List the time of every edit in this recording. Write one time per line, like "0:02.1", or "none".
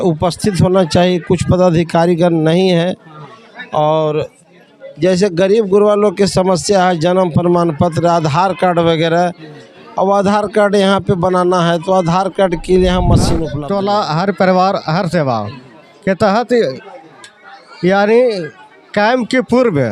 0:13.5